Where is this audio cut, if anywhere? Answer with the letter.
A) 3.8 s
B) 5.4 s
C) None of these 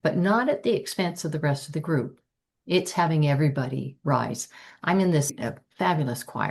B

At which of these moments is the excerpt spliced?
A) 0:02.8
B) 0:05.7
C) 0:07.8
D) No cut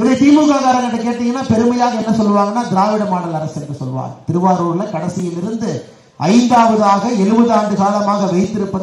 D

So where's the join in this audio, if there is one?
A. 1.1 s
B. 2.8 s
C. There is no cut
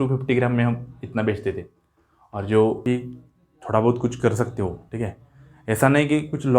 B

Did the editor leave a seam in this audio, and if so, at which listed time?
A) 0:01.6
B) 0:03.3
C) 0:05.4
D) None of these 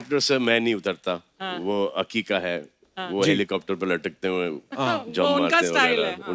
D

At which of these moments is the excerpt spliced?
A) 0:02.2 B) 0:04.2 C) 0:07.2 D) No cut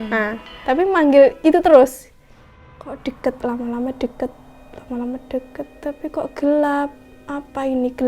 A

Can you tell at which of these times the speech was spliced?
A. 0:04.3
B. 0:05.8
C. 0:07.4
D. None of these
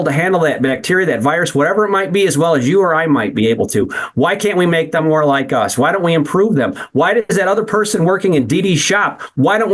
D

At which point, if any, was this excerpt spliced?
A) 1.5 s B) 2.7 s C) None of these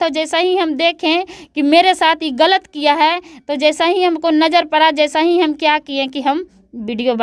C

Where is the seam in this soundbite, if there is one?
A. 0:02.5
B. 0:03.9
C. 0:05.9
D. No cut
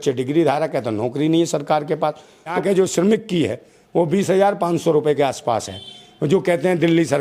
A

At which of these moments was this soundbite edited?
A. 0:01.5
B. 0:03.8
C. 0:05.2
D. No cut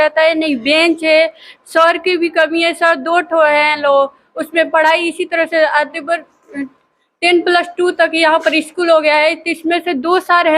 D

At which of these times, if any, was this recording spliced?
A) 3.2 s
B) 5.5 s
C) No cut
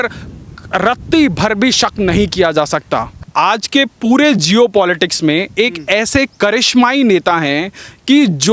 A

